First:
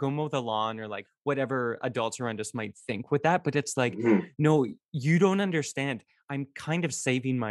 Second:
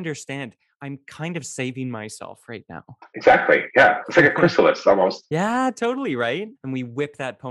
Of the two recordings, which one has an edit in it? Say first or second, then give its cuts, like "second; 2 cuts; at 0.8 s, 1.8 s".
second; 1 cut; at 6.6 s